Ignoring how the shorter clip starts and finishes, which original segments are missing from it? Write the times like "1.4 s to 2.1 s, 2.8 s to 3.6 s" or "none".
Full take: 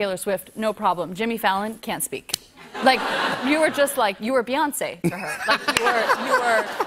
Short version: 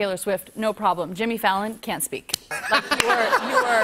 2.5 s to 5.3 s